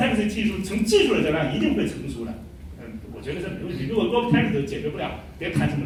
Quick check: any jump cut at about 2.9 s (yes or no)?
no